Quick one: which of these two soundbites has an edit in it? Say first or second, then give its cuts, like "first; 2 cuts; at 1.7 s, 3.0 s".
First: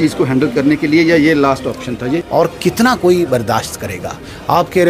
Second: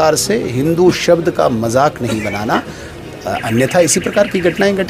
first; 1 cut; at 2.2 s